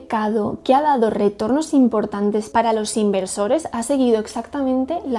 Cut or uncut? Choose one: uncut